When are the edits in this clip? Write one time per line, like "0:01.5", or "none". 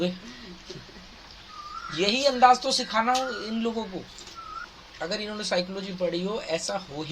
0:04.6